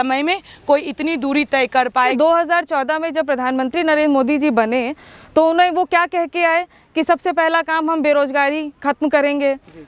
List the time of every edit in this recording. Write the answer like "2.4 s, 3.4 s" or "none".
2.0 s